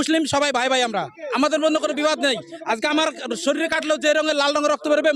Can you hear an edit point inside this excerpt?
no; 0 cuts

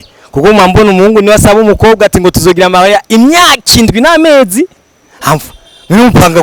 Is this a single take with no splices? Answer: yes; 0 cuts

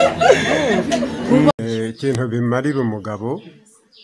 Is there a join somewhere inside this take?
yes; 1 cut; at 1.5 s

